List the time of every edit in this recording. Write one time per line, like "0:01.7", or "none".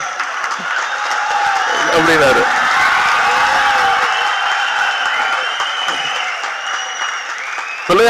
none